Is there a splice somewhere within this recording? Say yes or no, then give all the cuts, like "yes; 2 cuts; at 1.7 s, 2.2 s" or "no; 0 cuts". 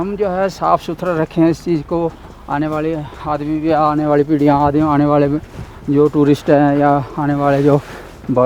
no; 0 cuts